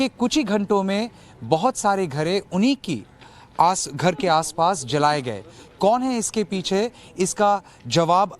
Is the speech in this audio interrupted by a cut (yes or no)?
no